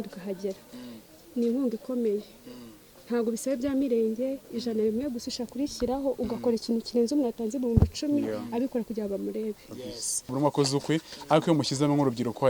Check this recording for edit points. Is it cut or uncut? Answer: cut